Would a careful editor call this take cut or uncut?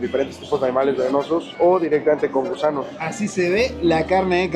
cut